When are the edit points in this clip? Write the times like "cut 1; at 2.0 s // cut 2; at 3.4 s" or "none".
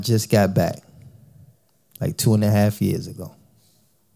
none